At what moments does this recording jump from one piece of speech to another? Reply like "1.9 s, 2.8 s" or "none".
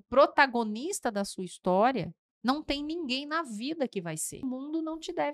4.4 s